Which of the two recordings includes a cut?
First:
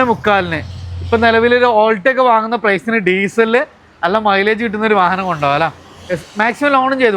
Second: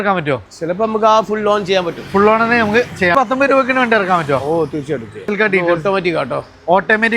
second; 2 cuts; at 3.1 s, 5.2 s

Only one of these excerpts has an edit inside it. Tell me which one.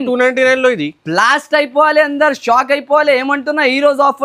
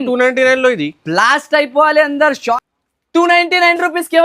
second; 1 cut; at 2.6 s

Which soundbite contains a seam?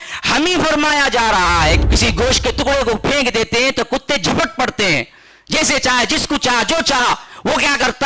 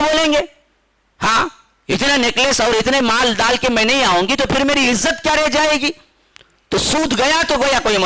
first; 1 cut; at 1.8 s

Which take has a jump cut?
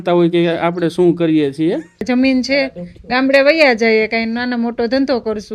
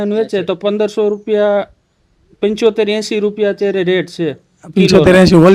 first; 1 cut; at 2.0 s

